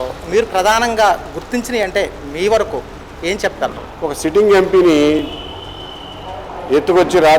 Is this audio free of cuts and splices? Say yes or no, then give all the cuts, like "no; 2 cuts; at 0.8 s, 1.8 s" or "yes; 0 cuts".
no; 1 cut; at 3.9 s